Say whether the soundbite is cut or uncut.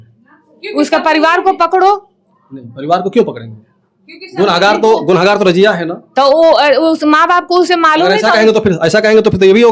uncut